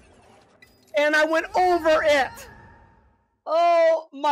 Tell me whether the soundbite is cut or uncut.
uncut